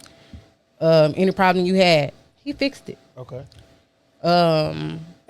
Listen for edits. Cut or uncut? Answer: cut